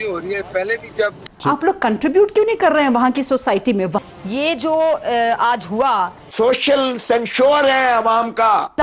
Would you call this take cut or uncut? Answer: cut